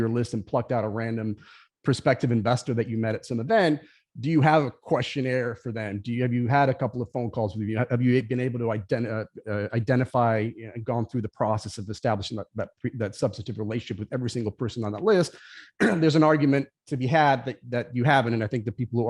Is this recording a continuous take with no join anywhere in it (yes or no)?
yes